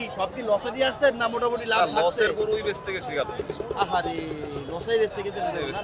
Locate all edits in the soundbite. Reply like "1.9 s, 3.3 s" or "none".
none